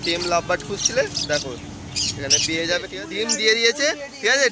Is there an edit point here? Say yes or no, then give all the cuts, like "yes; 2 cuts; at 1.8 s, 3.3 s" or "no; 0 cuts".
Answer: yes; 1 cut; at 3.0 s